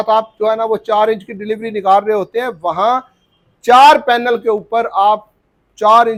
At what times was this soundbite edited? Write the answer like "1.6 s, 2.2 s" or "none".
none